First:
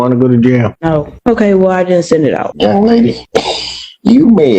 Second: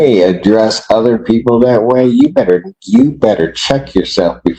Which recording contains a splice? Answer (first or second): first